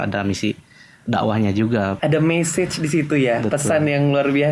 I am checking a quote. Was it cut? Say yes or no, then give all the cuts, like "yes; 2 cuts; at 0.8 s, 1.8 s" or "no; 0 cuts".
yes; 1 cut; at 2.0 s